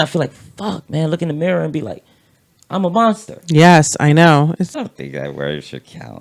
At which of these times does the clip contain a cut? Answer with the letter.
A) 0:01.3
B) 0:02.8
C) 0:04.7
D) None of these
C